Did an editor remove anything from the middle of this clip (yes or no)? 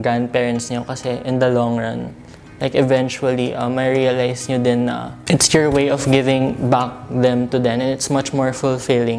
no